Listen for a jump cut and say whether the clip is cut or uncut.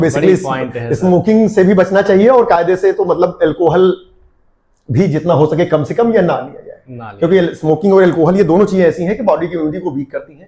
uncut